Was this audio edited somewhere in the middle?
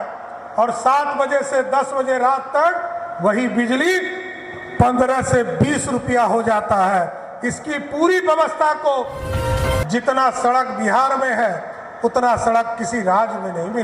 yes; 1 cut; at 9.3 s

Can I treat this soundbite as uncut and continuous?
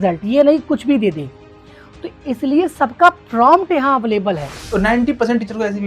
no; 1 cut; at 4.7 s

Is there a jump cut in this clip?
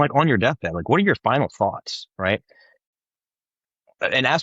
yes; 1 cut; at 2.9 s

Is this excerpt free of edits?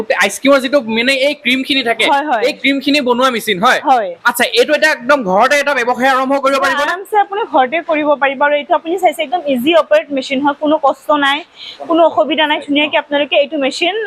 yes; 0 cuts

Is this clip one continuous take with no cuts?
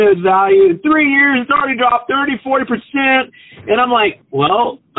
yes; 0 cuts

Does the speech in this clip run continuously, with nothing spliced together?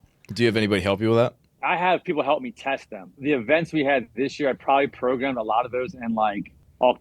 no; 2 cuts; at 1.5 s, 3.2 s

